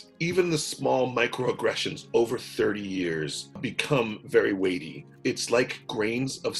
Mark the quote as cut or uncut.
uncut